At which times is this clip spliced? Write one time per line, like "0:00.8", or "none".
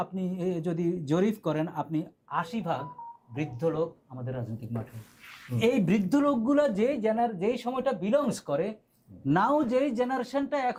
none